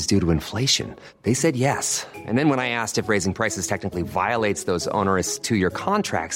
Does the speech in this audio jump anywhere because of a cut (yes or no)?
no